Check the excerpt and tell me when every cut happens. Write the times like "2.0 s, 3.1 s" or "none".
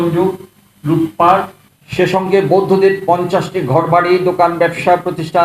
none